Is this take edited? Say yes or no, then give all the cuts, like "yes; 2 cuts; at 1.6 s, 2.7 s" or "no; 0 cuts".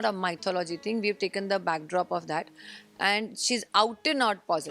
no; 0 cuts